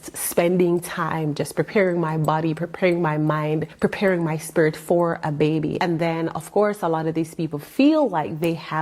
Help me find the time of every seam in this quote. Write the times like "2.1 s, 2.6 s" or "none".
3.7 s, 5.8 s